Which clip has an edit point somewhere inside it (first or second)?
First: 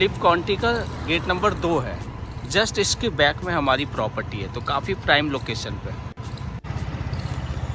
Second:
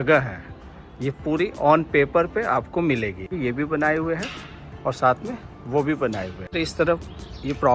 second